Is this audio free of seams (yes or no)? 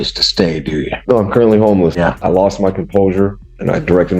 no